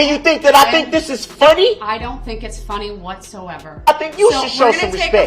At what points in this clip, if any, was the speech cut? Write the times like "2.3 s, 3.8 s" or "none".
3.9 s